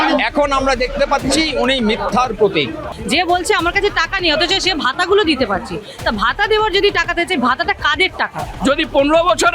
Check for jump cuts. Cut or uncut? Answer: cut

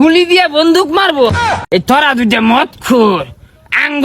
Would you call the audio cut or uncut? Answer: cut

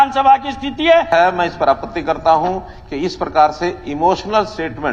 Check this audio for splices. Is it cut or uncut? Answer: cut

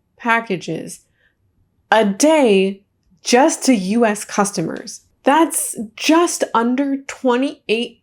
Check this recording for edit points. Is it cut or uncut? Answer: cut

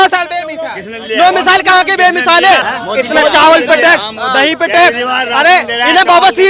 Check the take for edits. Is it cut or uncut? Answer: uncut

